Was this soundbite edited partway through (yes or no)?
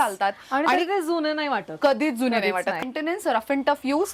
yes